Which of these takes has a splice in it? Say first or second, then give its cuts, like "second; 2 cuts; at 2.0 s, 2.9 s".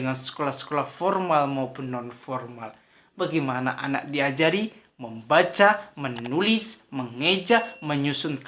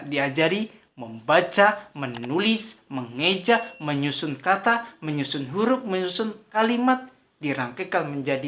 second; 1 cut; at 6.4 s